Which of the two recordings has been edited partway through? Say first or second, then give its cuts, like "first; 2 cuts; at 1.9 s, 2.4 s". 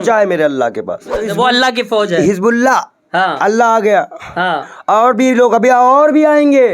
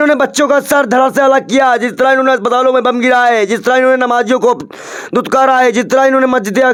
first; 1 cut; at 1.3 s